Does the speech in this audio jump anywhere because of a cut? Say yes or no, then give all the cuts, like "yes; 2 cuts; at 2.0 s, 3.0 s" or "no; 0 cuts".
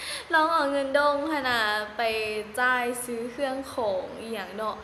no; 0 cuts